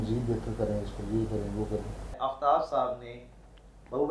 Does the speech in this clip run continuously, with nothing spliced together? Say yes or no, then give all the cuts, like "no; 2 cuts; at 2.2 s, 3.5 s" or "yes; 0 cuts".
no; 1 cut; at 2.1 s